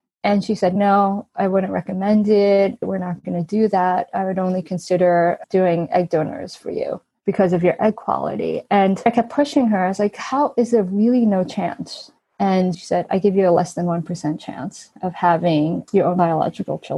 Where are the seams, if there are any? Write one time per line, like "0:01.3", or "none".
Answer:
0:00.7
0:07.1
0:09.1
0:12.8